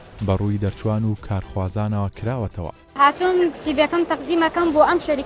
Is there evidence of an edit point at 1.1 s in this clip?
no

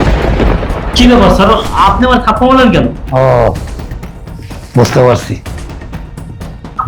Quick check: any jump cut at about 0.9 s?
yes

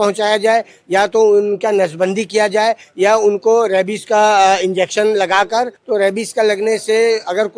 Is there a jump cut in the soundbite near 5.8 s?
yes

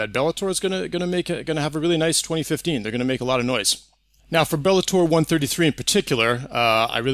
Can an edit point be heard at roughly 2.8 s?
no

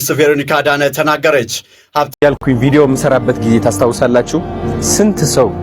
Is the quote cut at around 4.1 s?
no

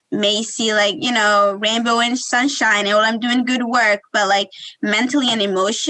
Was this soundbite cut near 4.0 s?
no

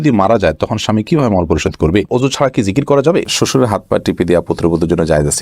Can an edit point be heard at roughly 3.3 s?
yes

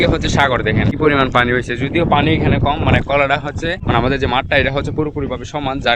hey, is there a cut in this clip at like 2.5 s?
no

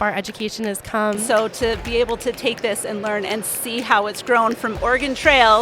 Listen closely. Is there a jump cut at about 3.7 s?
no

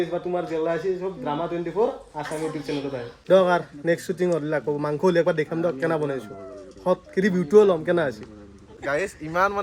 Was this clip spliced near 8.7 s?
yes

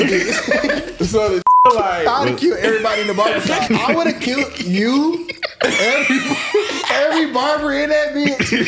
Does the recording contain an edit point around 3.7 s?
yes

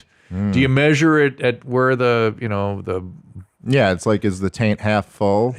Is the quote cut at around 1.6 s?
no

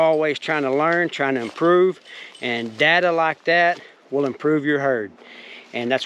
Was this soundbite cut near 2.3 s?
no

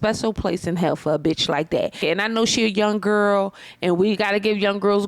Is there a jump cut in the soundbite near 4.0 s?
no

